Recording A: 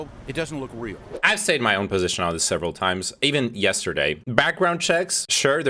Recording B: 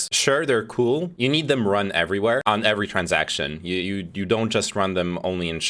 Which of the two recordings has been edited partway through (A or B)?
A